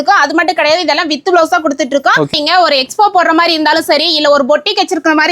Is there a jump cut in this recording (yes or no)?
yes